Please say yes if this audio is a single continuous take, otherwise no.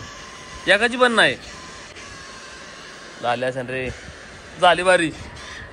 yes